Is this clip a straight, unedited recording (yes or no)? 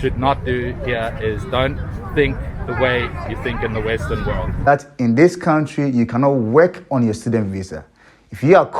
no